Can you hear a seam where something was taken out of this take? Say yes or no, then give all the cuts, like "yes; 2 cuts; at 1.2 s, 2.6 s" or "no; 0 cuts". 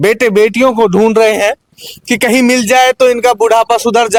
no; 0 cuts